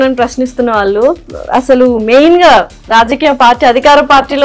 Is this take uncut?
yes; 0 cuts

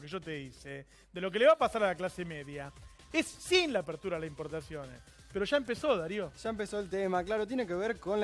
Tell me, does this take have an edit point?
yes; 1 cut; at 6.9 s

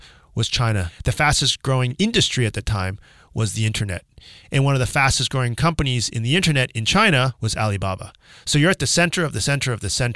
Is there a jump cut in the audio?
yes; 3 cuts; at 0.9 s, 1.9 s, 7.4 s

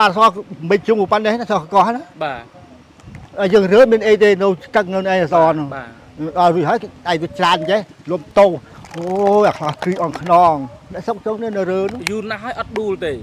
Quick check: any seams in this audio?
no; 0 cuts

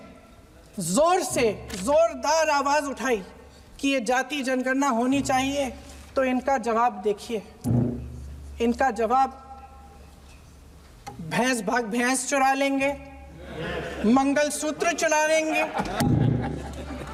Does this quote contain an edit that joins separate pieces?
no; 0 cuts

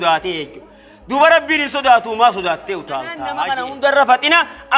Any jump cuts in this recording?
yes; 1 cut; at 3.2 s

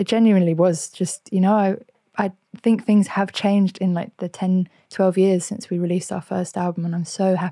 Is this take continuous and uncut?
yes; 0 cuts

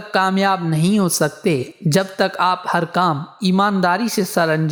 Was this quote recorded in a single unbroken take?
yes; 0 cuts

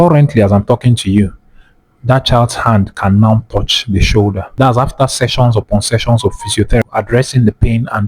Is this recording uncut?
no; 2 cuts; at 4.4 s, 6.8 s

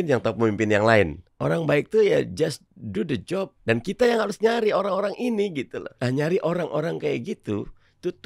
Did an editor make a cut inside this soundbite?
yes; 3 cuts; at 1.2 s, 3.5 s, 5.9 s

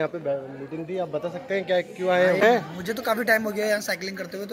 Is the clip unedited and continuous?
no; 1 cut; at 2.5 s

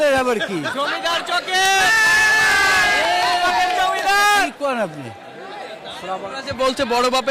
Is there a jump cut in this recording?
no; 0 cuts

